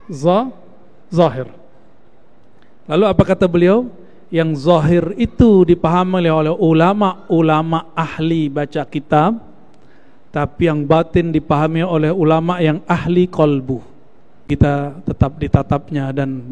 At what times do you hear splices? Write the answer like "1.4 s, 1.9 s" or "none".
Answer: 14.5 s